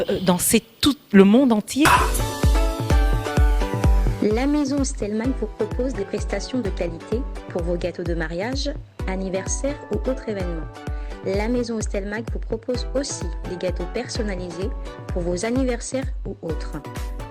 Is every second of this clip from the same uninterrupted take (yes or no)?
no